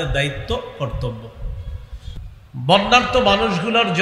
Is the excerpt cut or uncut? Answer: cut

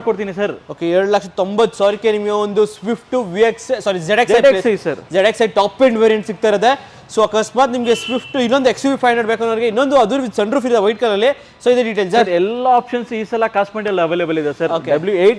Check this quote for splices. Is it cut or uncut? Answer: uncut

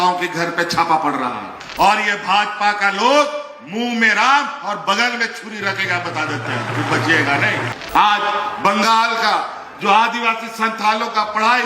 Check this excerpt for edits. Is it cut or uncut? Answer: cut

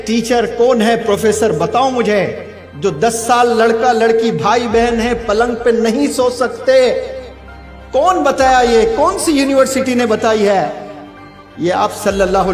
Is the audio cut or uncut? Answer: uncut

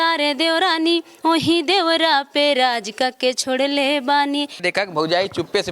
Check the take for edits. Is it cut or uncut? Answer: cut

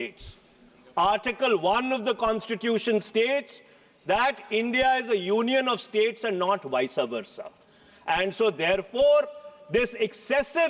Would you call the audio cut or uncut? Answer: uncut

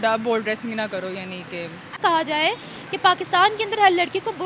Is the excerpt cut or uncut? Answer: cut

